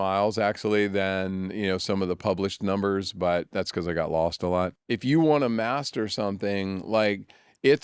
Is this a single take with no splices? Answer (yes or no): no